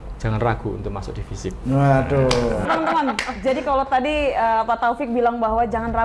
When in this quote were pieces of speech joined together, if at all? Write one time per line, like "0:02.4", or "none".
0:02.6